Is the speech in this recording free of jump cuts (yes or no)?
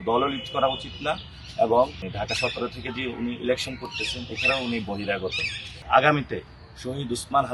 no